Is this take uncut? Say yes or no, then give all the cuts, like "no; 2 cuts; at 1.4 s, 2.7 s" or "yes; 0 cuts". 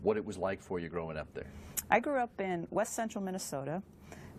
yes; 0 cuts